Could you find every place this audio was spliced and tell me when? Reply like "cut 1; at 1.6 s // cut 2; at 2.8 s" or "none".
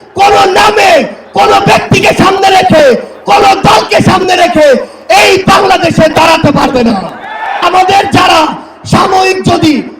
cut 1; at 7.6 s